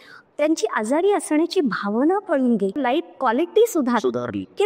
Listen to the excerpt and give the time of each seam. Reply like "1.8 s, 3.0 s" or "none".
2.8 s